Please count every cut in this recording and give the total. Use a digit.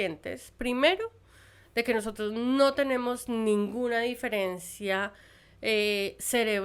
0